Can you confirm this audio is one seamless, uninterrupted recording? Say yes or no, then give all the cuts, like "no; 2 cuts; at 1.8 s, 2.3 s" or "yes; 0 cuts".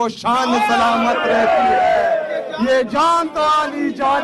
yes; 0 cuts